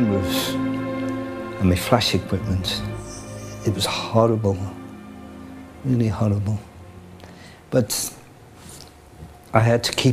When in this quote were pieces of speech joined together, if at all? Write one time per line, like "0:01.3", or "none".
none